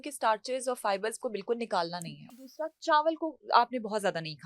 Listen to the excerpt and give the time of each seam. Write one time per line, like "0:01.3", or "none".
0:02.4

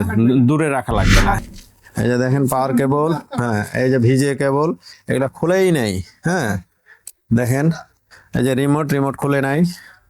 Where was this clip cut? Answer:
0:01.4

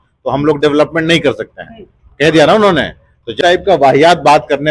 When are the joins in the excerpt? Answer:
0:03.4

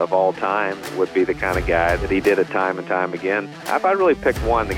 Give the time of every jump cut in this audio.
0:00.9
0:02.0
0:03.6

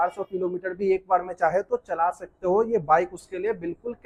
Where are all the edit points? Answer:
none

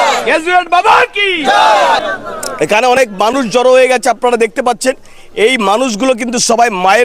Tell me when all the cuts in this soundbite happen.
0:02.0

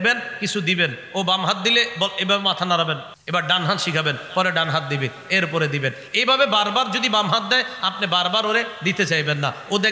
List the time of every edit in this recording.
0:03.1

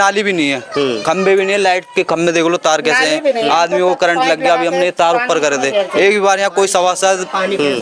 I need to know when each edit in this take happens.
none

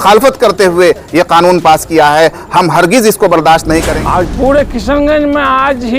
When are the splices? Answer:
0:03.9

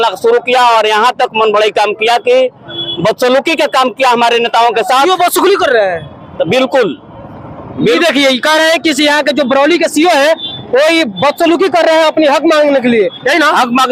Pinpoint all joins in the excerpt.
none

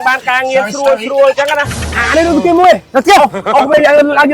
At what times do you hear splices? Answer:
0:01.9

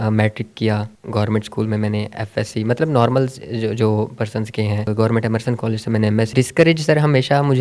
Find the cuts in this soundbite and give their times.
0:00.9
0:04.9
0:06.3

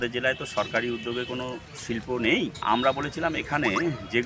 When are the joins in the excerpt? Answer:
0:02.6

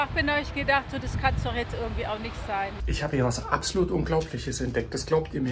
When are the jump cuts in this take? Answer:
0:02.8

